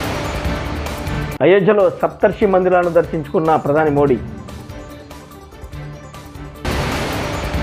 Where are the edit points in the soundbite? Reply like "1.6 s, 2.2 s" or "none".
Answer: 1.2 s